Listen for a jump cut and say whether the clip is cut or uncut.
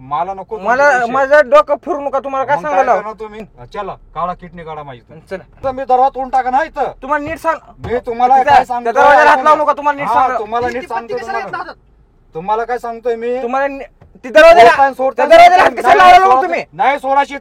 cut